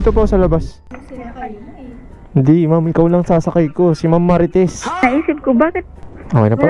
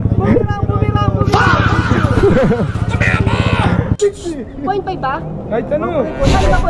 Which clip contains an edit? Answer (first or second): first